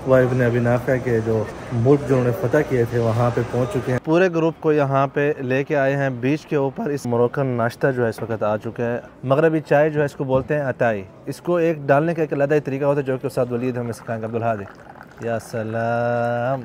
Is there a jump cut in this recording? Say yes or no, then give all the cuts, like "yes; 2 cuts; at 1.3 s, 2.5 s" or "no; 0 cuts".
yes; 4 cuts; at 1.6 s, 4.0 s, 7.1 s, 9.1 s